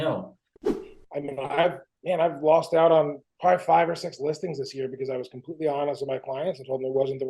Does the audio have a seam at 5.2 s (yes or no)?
no